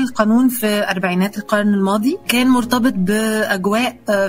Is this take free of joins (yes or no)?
no